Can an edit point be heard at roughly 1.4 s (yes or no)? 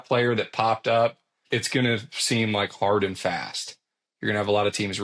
yes